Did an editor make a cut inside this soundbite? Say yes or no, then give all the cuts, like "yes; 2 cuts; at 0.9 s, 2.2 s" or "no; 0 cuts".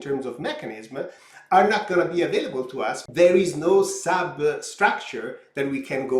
yes; 1 cut; at 3.0 s